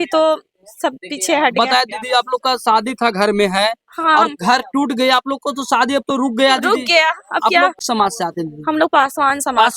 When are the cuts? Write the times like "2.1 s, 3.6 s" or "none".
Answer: 7.8 s

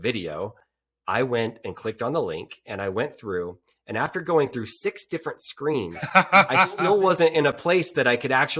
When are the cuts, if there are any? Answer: none

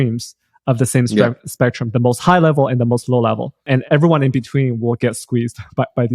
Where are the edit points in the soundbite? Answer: 3.8 s

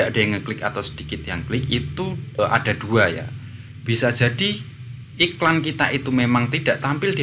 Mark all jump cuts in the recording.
2.4 s

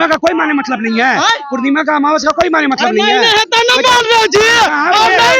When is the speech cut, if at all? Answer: none

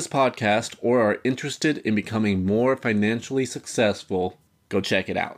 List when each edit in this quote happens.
none

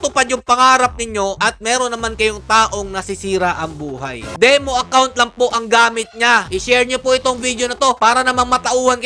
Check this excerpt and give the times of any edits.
4.3 s, 6.5 s

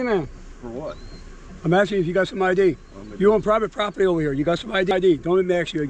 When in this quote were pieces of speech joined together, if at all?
4.9 s

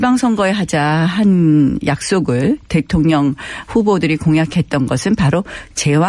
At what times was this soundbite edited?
none

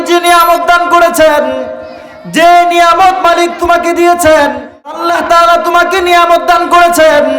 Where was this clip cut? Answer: 5.0 s

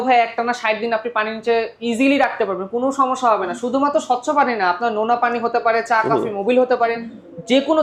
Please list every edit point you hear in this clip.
none

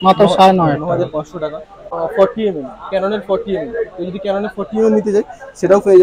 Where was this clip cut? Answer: 1.9 s

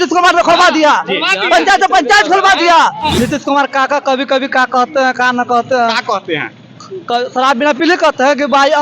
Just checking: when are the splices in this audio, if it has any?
3.1 s

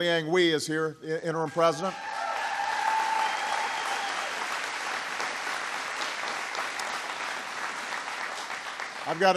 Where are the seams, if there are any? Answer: 4.5 s

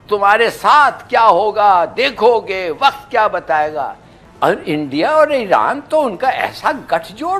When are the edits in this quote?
4.2 s

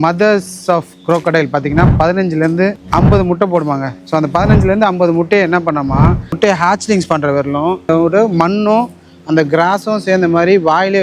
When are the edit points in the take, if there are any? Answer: 2.8 s, 6.4 s, 7.8 s

